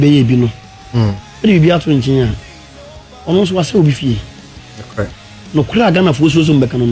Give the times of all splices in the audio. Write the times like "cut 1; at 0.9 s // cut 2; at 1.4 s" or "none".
none